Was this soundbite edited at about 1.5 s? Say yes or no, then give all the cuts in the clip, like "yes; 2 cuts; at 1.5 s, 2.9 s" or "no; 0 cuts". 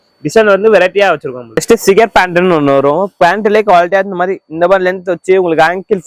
yes; 1 cut; at 1.5 s